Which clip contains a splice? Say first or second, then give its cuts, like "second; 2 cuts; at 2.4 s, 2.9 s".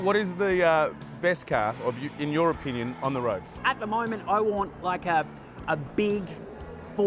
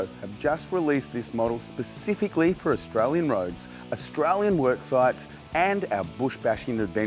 first; 1 cut; at 3.6 s